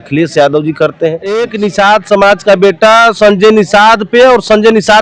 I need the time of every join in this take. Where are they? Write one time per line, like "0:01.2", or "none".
0:01.3